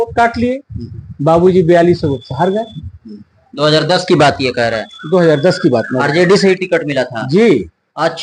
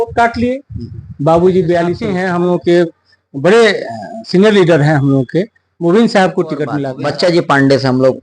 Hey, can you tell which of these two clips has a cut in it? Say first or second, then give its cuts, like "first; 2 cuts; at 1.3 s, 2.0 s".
second; 2 cuts; at 2.1 s, 6.8 s